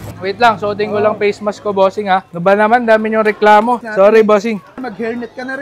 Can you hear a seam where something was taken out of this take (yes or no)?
yes